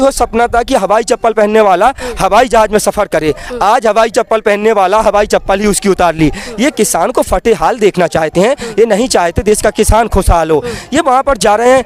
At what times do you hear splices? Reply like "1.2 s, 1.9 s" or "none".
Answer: none